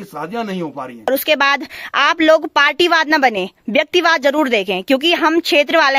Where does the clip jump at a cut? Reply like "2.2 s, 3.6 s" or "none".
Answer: 1.1 s